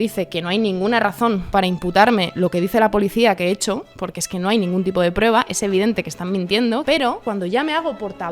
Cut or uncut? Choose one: cut